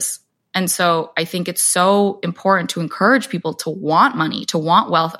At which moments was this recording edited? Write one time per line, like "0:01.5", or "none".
none